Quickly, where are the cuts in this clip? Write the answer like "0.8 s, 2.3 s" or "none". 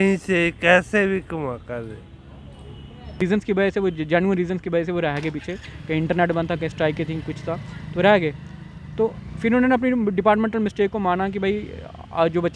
3.2 s